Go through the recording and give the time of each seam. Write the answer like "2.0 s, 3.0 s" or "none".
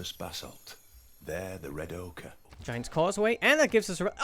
2.5 s

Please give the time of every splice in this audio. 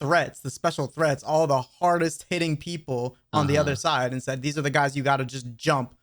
none

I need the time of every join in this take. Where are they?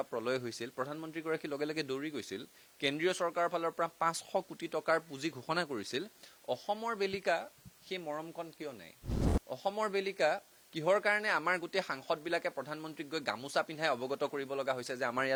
none

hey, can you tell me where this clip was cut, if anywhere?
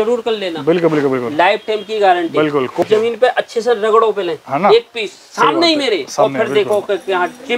2.8 s

